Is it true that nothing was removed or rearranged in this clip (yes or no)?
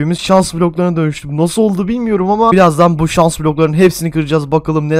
yes